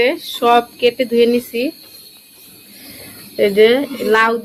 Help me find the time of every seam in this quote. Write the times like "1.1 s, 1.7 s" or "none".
none

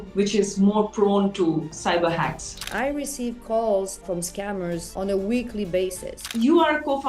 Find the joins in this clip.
1.7 s, 2.7 s, 4.0 s, 6.3 s

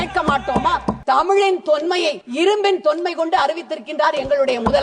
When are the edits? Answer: 0.9 s, 2.2 s

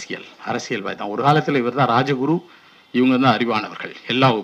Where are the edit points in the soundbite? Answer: none

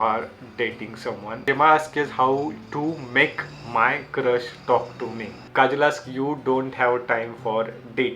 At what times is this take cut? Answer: 1.5 s, 5.4 s

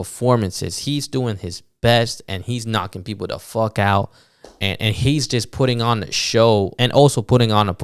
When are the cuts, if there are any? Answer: 6.7 s

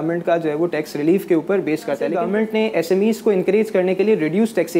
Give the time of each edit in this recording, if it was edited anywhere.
2.1 s

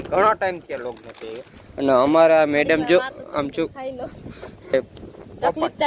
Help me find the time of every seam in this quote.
4.7 s

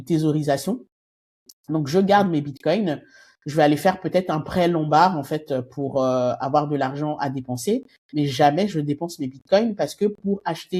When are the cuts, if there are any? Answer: none

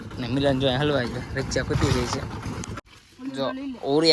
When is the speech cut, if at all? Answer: 2.7 s

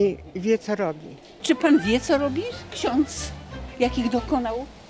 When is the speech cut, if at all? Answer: 1.3 s

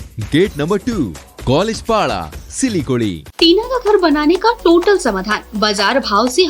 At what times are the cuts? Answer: 3.2 s

